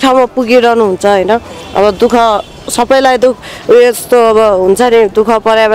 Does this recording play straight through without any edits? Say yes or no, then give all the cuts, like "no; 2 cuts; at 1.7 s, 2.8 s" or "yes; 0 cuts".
yes; 0 cuts